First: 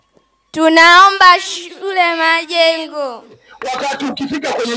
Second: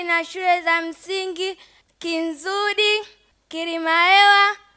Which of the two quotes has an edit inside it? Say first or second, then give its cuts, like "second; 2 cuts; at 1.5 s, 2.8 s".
first; 1 cut; at 3.5 s